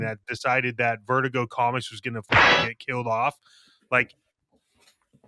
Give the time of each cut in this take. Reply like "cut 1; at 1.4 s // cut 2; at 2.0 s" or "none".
none